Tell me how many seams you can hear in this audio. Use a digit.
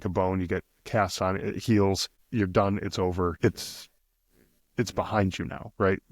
2